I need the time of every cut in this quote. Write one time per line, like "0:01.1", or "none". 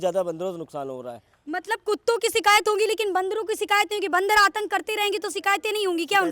none